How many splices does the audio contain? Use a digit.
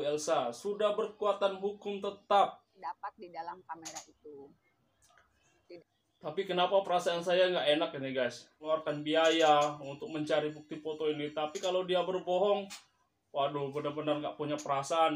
2